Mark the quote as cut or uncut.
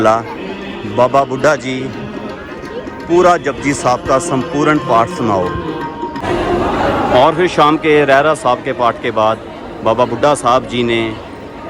uncut